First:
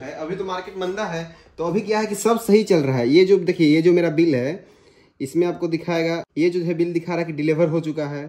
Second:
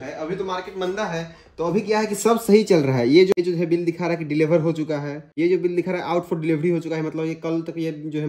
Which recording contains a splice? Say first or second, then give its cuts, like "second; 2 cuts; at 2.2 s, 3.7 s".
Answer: second; 2 cuts; at 3.3 s, 5.2 s